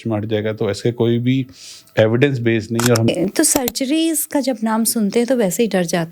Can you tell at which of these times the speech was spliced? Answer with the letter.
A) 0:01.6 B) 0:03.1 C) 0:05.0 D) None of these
B